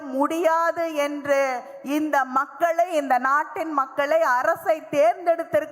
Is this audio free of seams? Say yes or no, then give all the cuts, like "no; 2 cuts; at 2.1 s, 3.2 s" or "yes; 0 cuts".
yes; 0 cuts